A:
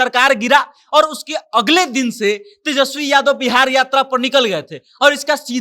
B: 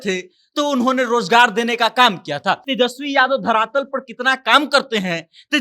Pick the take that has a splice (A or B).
B